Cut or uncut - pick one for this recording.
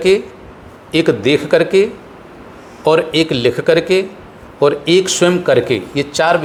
uncut